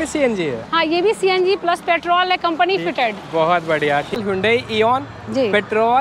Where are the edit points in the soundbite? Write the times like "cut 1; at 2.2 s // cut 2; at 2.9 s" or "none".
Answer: cut 1; at 4.2 s